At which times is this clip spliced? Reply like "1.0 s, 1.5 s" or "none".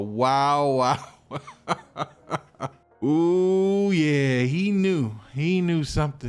2.5 s